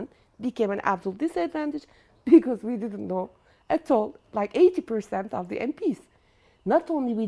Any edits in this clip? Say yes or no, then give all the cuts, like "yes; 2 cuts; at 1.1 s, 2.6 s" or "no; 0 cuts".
no; 0 cuts